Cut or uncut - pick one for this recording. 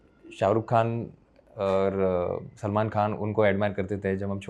uncut